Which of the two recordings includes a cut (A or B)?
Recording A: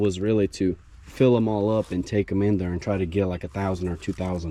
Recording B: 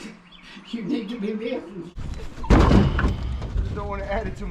B